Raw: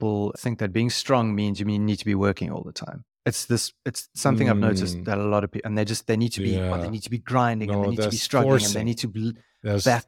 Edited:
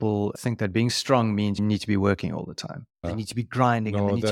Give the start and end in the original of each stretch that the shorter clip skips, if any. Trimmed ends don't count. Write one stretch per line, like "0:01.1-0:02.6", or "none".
0:01.6-0:01.8
0:03.2-0:06.8